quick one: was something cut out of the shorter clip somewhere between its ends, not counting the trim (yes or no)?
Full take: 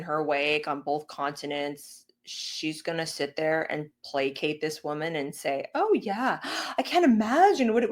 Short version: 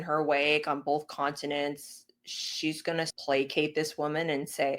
yes